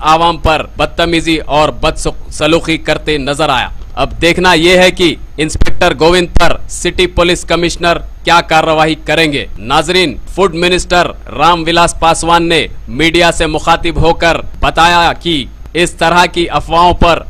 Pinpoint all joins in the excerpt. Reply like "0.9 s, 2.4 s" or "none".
4.6 s